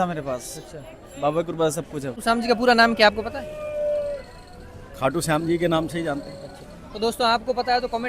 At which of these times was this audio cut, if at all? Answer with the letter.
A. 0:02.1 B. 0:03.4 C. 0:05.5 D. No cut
A